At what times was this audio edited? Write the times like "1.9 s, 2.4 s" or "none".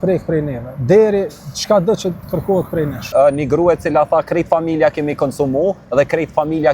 3.1 s